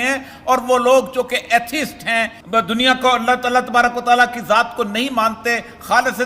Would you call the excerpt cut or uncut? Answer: cut